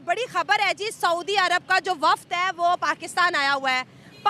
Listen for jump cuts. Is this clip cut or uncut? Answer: uncut